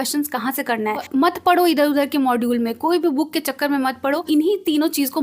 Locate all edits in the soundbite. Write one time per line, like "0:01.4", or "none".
0:01.0
0:04.2